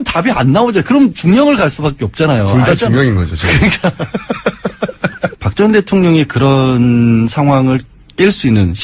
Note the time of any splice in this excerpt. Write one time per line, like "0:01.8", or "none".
0:05.4